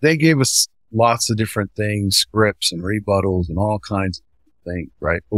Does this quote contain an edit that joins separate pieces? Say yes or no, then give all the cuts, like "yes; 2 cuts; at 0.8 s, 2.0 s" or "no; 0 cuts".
no; 0 cuts